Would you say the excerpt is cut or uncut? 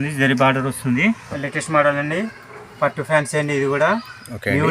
cut